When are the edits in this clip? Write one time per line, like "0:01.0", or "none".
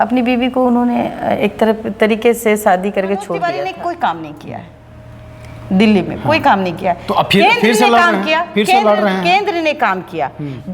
0:03.4